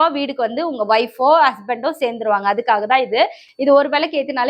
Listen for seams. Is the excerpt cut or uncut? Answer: cut